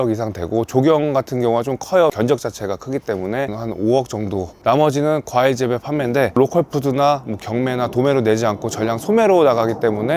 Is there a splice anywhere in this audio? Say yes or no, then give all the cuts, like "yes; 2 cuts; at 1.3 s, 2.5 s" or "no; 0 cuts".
no; 0 cuts